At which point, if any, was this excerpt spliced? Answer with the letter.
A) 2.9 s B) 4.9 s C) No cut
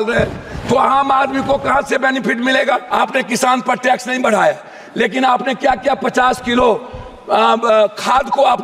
A